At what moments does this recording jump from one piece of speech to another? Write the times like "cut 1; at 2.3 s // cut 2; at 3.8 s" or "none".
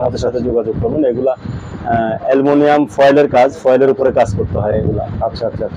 none